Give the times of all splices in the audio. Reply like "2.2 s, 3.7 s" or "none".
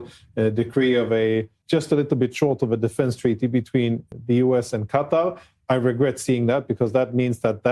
1.6 s, 4.0 s